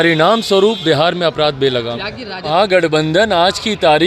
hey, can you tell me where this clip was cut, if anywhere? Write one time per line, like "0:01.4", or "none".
0:02.5